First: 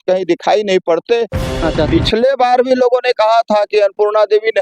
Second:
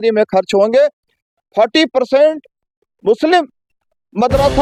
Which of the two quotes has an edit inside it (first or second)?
first